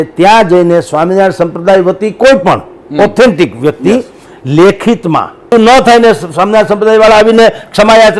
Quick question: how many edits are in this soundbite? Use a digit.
1